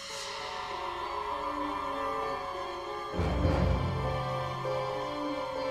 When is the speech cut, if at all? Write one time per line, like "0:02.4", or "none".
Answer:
0:04.7